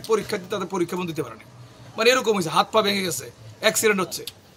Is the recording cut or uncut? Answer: uncut